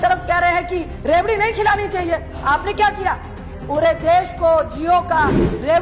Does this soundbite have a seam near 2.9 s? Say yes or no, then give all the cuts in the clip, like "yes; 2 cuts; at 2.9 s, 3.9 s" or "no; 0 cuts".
no; 1 cut; at 0.9 s